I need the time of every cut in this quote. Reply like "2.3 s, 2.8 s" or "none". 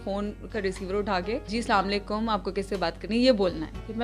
1.5 s